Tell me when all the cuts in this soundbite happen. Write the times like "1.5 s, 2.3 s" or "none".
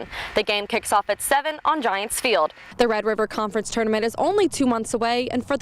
2.7 s